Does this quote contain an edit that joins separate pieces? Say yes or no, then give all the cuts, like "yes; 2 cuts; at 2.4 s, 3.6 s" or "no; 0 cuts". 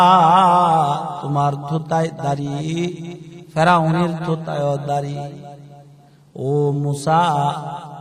no; 0 cuts